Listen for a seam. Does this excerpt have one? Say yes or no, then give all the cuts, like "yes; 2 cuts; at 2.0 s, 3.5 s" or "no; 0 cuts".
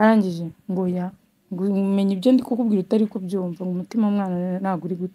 no; 0 cuts